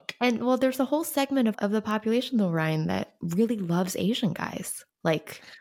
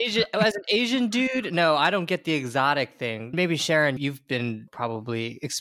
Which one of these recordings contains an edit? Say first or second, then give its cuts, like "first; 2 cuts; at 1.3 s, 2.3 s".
first; 2 cuts; at 1.6 s, 3.2 s